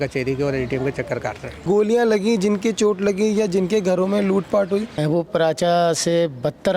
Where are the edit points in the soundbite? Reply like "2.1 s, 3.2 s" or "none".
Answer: 1.6 s, 5.0 s